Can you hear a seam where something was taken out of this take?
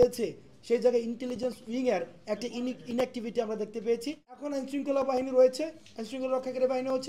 yes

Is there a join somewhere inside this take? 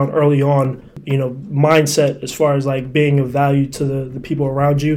yes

